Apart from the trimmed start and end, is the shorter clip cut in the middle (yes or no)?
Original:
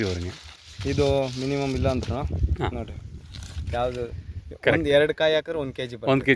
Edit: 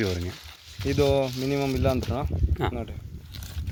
no